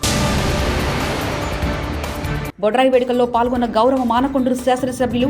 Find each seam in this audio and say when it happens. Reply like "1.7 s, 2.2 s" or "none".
2.0 s